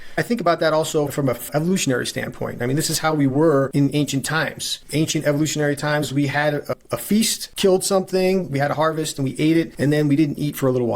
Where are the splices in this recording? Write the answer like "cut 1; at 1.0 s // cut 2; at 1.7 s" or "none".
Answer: cut 1; at 1.1 s // cut 2; at 3.7 s // cut 3; at 4.7 s // cut 4; at 7.4 s // cut 5; at 9.7 s